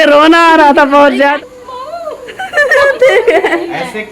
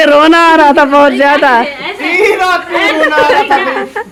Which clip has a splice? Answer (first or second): first